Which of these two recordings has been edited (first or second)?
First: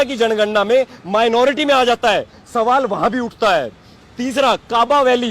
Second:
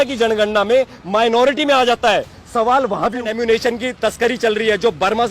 second